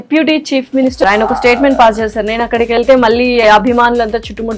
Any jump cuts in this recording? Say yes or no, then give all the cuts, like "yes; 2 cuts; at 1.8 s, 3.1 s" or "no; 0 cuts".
yes; 1 cut; at 1.1 s